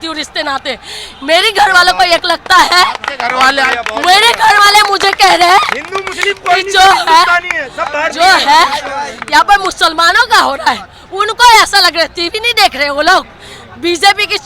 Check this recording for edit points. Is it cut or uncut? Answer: uncut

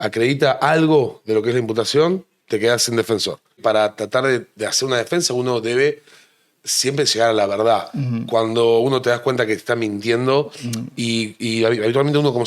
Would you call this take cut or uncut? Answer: cut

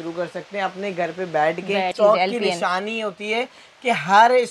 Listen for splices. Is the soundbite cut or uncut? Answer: cut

